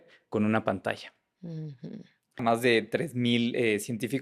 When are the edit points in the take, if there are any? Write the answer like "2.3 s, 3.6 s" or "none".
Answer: 2.4 s